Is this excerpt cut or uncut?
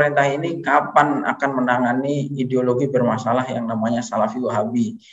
uncut